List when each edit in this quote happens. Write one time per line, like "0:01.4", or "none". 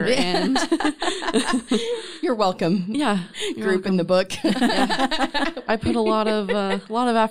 0:05.6